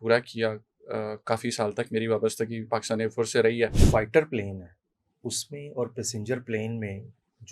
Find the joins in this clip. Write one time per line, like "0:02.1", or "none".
0:03.8